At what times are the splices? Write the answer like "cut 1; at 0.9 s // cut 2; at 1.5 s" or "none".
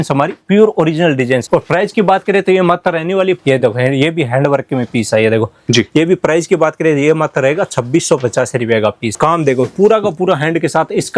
cut 1; at 1.4 s // cut 2; at 3.4 s // cut 3; at 9.2 s